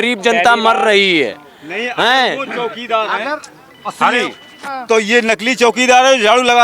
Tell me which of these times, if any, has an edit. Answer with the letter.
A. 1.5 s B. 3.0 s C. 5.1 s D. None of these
D